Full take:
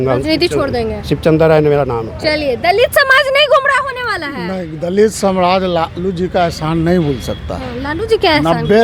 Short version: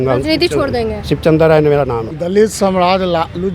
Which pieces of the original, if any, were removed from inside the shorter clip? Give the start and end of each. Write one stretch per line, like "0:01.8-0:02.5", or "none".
0:02.1-0:04.7